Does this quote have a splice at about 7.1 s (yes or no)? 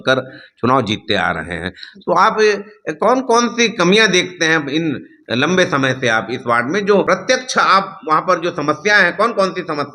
yes